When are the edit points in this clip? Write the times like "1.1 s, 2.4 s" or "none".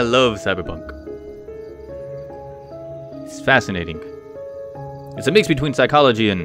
none